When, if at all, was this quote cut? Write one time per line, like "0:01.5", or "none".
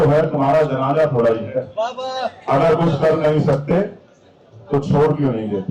none

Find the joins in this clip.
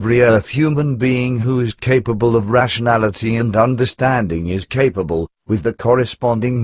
none

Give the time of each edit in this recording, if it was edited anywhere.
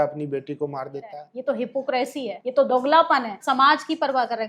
0:01.3
0:02.4
0:03.4

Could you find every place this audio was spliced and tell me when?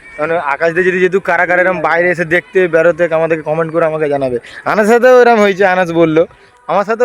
none

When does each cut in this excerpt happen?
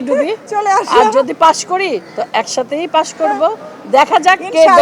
none

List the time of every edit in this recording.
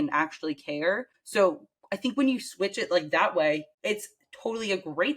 0:01.1
0:03.7

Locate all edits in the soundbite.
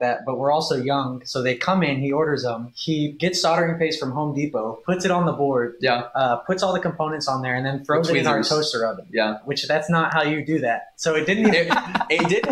0:03.1
0:09.5

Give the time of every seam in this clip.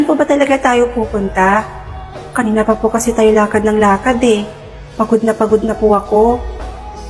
none

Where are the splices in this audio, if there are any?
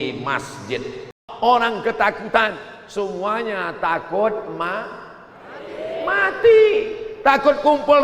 0:01.2

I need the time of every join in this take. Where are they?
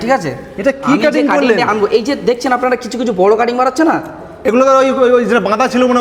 none

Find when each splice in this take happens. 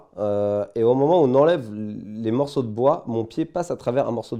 none

